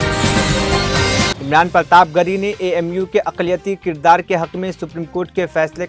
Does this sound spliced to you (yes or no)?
no